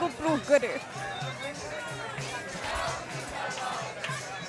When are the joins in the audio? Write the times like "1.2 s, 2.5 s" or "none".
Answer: none